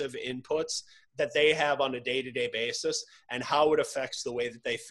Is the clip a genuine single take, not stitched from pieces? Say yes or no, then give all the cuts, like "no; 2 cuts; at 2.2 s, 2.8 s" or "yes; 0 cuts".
no; 1 cut; at 1.0 s